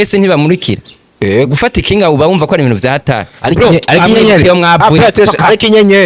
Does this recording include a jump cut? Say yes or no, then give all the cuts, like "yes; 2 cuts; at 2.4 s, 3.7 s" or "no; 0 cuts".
no; 0 cuts